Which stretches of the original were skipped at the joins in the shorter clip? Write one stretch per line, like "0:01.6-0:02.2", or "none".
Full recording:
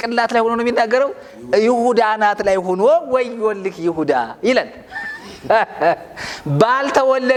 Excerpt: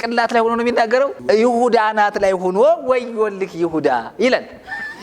0:01.2-0:01.4